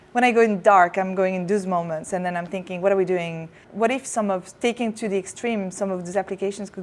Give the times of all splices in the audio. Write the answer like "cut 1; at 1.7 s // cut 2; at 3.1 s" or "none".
cut 1; at 3.6 s